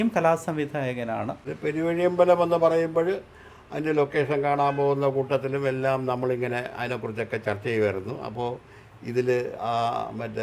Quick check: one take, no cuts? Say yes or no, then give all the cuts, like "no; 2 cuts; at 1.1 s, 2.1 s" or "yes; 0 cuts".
no; 1 cut; at 1.5 s